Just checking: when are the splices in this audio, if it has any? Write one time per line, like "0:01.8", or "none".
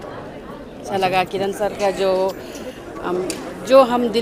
0:00.9